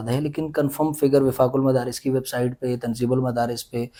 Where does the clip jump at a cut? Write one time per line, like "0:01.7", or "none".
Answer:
none